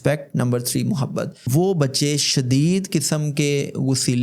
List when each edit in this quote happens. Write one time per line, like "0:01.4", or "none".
0:01.5